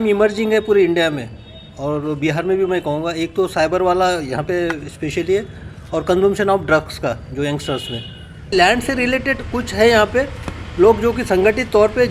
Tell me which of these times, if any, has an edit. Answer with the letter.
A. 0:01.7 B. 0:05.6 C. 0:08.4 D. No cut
C